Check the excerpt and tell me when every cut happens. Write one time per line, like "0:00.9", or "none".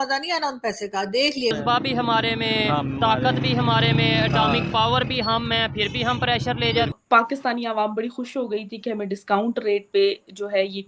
0:01.5
0:07.0